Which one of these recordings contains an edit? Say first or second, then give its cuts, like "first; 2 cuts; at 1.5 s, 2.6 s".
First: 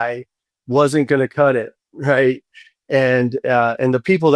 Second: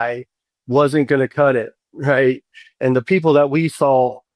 second; 1 cut; at 2.8 s